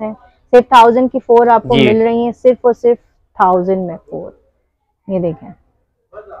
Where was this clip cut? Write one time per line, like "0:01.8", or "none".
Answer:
none